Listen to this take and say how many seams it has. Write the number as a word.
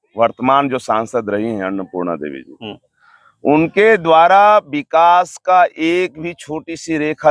zero